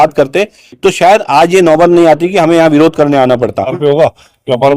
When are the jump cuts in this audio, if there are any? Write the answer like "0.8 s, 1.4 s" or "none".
3.8 s